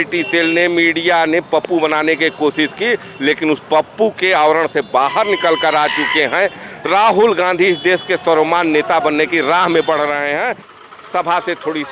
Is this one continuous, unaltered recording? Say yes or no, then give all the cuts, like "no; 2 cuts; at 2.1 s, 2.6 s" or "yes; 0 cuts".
no; 1 cut; at 10.6 s